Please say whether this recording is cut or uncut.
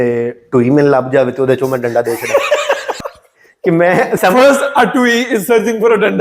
cut